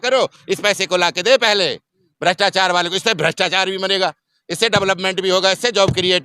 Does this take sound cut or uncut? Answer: uncut